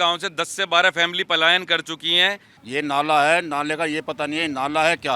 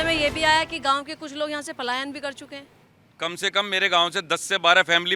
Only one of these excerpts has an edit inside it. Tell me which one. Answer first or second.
first